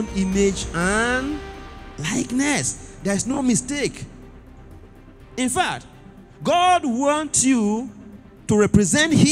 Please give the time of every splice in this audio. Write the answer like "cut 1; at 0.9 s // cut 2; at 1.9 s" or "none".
none